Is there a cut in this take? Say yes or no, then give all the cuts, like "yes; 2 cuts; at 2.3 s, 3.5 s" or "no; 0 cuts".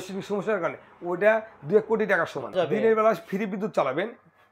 yes; 1 cut; at 2.5 s